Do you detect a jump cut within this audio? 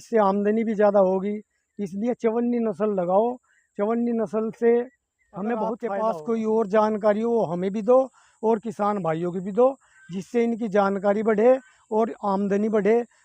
yes; 1 cut; at 5.8 s

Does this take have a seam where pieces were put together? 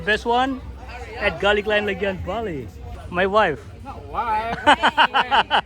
yes; 1 cut; at 3.0 s

